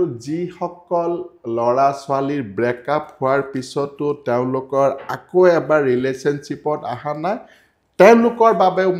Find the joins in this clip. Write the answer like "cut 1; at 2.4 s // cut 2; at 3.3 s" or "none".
none